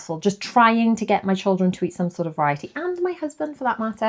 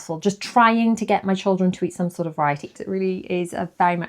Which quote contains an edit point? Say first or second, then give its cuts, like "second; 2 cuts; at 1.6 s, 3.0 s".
second; 1 cut; at 2.7 s